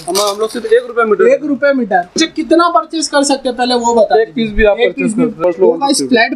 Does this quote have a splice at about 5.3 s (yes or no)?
yes